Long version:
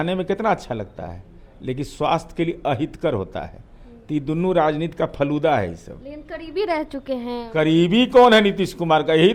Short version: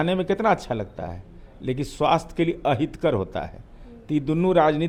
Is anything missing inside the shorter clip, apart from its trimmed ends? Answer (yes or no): no